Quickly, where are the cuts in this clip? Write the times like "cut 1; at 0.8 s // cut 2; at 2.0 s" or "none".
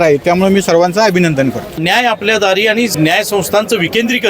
cut 1; at 1.8 s // cut 2; at 2.9 s